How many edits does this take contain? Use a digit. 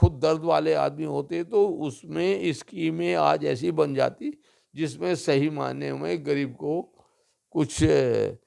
0